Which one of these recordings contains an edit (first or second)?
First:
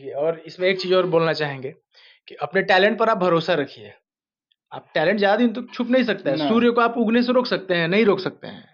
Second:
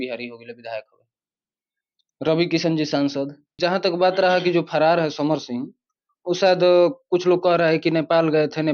second